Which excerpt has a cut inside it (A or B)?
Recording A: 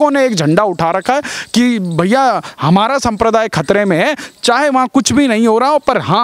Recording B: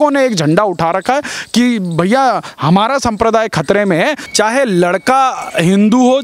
B